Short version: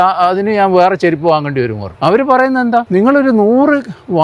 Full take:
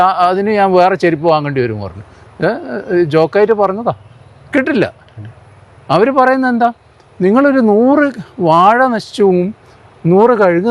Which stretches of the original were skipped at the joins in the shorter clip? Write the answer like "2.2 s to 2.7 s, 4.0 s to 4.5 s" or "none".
1.8 s to 5.7 s, 6.7 s to 7.2 s